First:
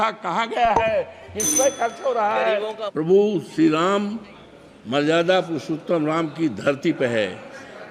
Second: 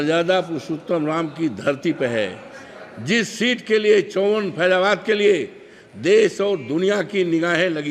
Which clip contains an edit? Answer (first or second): first